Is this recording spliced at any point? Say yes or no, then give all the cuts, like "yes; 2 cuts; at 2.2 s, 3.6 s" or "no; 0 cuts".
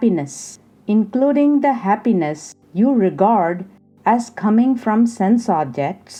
no; 0 cuts